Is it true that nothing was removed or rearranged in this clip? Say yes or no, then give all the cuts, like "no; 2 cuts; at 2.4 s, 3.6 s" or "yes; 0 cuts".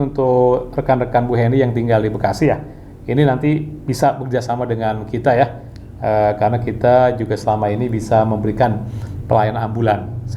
yes; 0 cuts